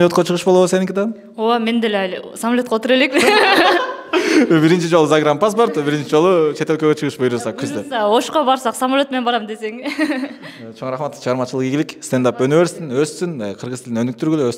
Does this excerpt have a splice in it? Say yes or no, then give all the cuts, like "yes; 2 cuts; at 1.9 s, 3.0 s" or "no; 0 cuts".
no; 0 cuts